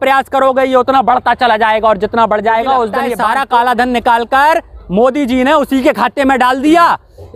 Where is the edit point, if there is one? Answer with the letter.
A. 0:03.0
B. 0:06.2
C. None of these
A